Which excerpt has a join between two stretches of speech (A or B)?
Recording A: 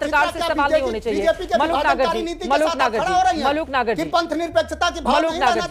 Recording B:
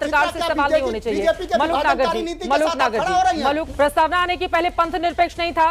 B